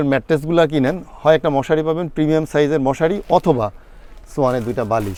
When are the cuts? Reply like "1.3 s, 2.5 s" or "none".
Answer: none